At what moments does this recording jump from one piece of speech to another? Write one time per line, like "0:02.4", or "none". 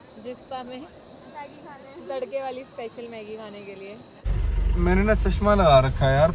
0:04.0